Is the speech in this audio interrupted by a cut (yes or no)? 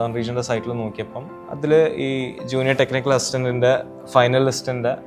yes